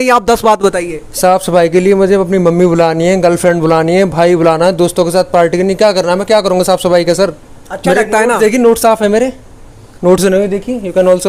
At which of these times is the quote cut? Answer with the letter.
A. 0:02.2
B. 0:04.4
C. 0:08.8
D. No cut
D